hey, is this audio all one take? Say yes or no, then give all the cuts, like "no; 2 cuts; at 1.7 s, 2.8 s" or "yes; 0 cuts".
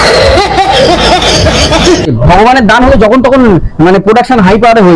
no; 1 cut; at 2.1 s